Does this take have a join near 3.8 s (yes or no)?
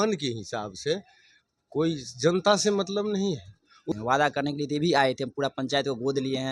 yes